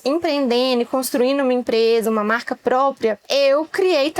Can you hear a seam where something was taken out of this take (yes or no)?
yes